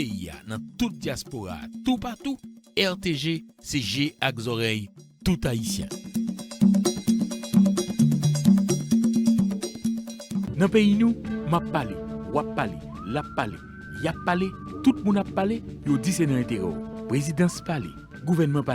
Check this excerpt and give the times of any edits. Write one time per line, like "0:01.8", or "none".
0:10.5